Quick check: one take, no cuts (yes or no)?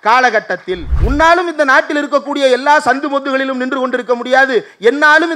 no